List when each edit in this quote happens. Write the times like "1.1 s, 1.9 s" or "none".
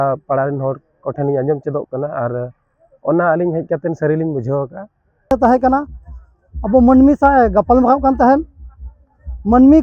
5.3 s

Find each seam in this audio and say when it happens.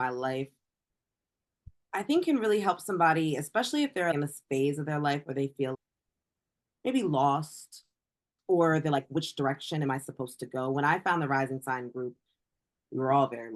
4.1 s

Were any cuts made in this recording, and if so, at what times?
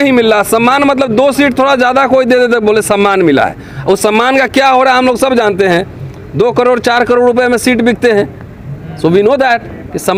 none

